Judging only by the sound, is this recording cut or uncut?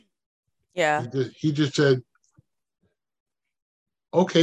uncut